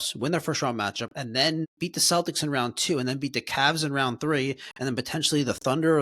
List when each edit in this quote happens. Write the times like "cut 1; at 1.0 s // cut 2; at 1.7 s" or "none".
cut 1; at 1.7 s